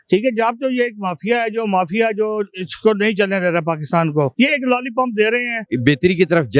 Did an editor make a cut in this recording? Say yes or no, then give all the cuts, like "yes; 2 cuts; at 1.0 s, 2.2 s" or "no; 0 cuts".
yes; 2 cuts; at 4.3 s, 5.6 s